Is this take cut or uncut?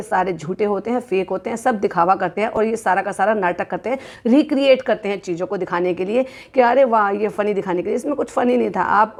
uncut